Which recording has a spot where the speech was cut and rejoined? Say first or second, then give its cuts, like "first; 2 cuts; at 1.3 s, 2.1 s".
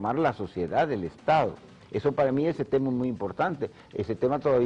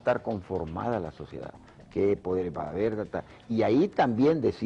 second; 1 cut; at 2.2 s